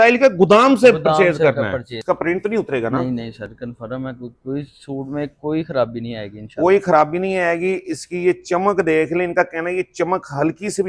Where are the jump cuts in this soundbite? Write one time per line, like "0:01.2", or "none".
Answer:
0:01.9